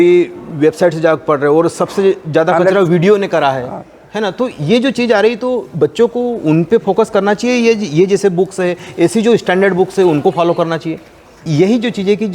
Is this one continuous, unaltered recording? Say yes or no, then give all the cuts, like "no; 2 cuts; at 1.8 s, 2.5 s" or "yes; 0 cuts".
no; 1 cut; at 11.3 s